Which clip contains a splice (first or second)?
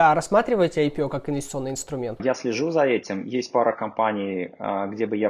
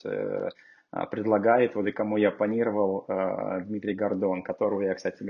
first